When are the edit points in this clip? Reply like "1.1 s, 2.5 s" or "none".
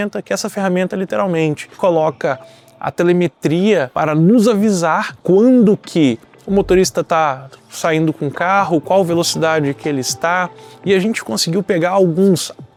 none

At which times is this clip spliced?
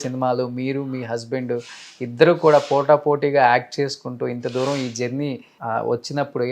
5.5 s

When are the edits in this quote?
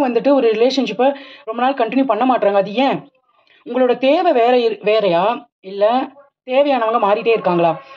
none

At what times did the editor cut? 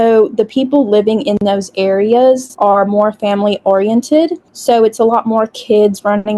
2.5 s

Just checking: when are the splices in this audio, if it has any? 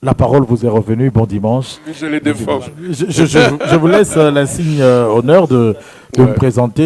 2.0 s

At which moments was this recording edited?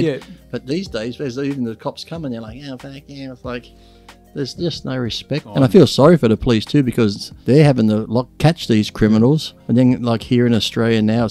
5.5 s, 7.3 s, 8.3 s, 9.5 s

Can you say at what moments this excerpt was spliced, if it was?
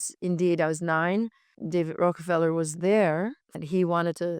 1.5 s, 3.5 s

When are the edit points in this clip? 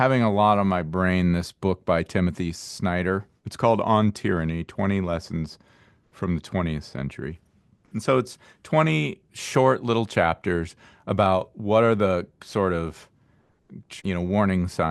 3.4 s

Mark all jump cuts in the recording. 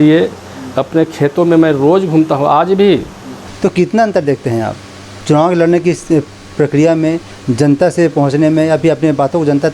3.5 s

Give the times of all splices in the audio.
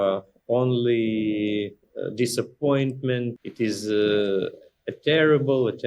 3.4 s

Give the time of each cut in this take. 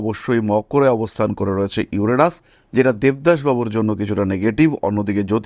none

